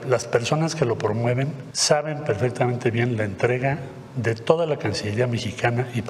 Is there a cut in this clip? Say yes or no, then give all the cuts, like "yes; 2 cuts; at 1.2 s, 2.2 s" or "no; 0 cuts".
yes; 1 cut; at 1.7 s